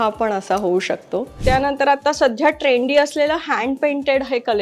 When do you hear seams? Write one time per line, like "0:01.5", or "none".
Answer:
0:01.3

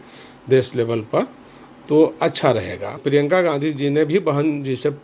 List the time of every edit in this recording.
0:03.0

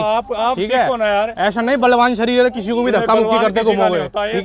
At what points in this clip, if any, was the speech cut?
none

